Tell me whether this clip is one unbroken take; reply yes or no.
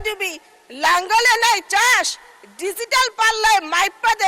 yes